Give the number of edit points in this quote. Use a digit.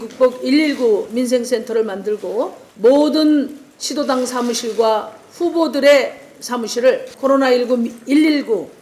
2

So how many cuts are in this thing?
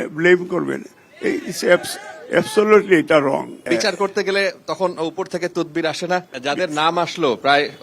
2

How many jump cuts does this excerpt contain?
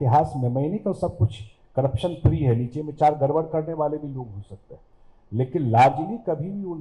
0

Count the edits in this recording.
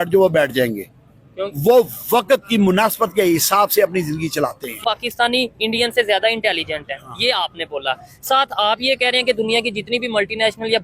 1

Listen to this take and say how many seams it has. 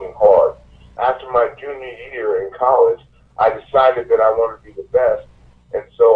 1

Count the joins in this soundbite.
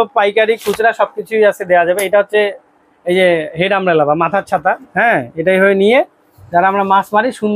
1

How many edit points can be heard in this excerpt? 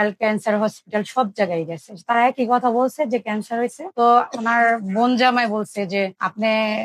1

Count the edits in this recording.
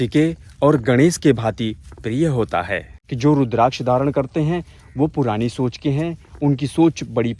1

